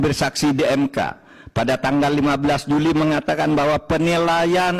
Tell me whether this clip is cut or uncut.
uncut